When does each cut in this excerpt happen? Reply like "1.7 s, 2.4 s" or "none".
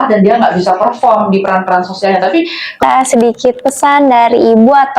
2.8 s